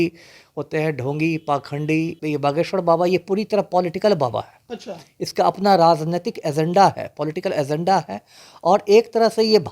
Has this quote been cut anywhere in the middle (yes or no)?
yes